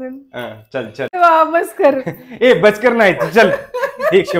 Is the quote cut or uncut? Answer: cut